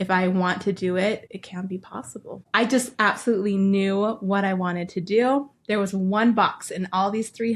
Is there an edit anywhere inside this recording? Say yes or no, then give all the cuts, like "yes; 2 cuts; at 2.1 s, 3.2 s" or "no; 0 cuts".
yes; 1 cut; at 2.4 s